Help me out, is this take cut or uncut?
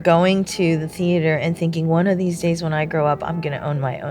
uncut